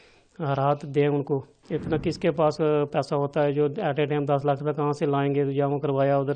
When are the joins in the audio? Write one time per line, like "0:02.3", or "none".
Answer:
0:01.5